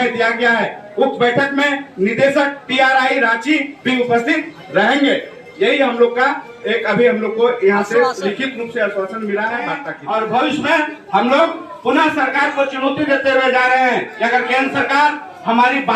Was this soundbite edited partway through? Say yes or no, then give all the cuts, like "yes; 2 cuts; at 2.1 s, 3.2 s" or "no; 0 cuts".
yes; 1 cut; at 9.9 s